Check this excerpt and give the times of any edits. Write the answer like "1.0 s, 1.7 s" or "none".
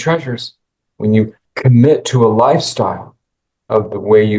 1.4 s